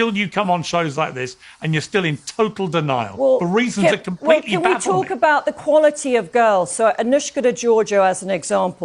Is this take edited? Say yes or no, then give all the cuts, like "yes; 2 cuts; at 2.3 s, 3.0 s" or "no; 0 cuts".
yes; 1 cut; at 4.5 s